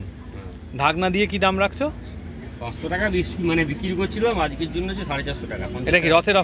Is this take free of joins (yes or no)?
yes